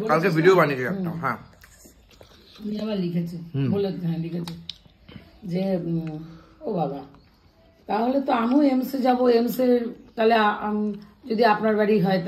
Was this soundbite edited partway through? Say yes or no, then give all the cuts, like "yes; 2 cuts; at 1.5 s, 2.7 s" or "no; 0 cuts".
no; 0 cuts